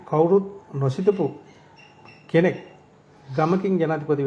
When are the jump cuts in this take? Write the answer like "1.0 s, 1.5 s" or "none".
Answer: none